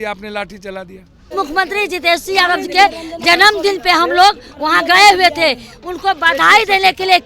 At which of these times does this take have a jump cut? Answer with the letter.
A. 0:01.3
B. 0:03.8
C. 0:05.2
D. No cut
A